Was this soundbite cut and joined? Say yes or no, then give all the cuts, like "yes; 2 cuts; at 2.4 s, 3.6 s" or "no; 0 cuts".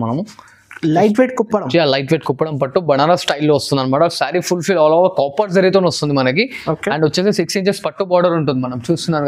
no; 0 cuts